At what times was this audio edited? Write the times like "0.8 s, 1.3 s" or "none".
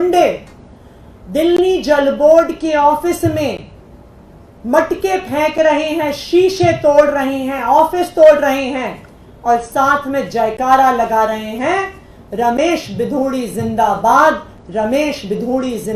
none